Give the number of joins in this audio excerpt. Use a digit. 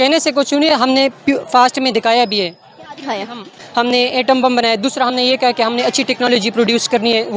1